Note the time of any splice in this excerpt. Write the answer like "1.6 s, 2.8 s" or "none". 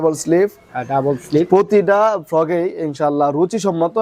none